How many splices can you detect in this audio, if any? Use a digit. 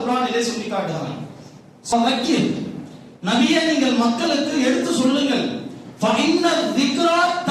1